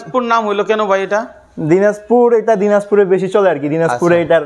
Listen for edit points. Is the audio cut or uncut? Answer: uncut